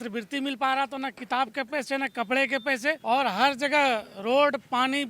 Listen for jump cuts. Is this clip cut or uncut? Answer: cut